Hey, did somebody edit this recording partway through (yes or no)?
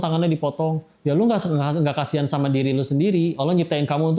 no